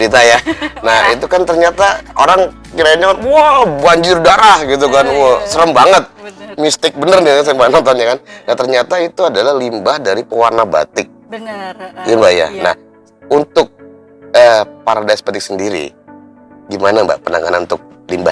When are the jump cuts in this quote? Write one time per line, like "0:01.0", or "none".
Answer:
none